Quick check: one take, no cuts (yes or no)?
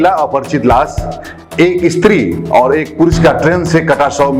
yes